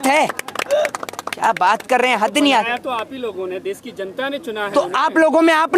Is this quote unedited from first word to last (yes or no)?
yes